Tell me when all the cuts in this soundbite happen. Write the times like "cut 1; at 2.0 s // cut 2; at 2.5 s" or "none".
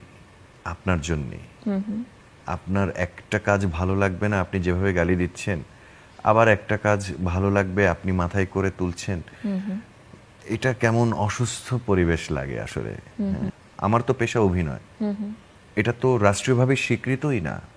cut 1; at 13.6 s